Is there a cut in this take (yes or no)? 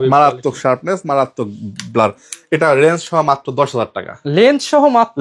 no